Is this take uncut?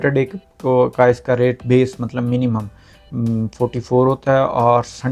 yes; 0 cuts

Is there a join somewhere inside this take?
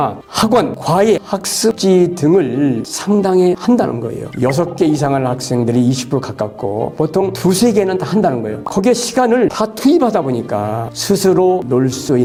no; 0 cuts

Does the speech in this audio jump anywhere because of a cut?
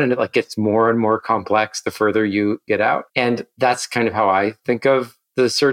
yes; 1 cut; at 2.9 s

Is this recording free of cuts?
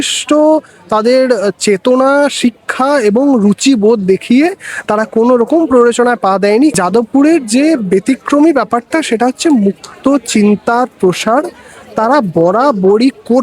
no; 1 cut; at 6.7 s

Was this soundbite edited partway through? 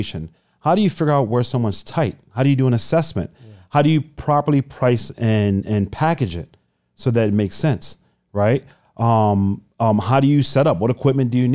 no; 0 cuts

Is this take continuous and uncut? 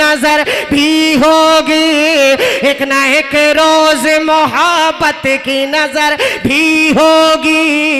yes; 0 cuts

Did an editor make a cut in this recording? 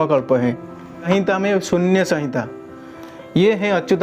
yes; 1 cut; at 1.1 s

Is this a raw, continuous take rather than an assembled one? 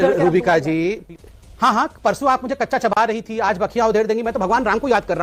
yes; 0 cuts

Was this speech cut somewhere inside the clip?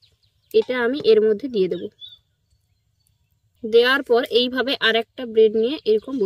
yes; 1 cut; at 3.5 s

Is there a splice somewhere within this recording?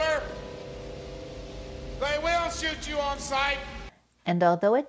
no; 0 cuts

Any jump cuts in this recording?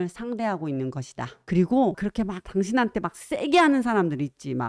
yes; 1 cut; at 1.4 s

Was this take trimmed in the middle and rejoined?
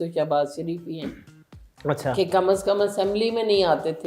no; 0 cuts

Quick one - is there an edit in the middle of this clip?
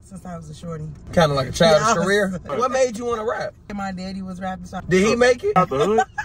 yes; 5 cuts; at 1.0 s, 2.5 s, 3.7 s, 4.8 s, 5.5 s

